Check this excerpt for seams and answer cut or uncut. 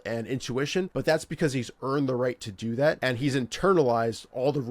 cut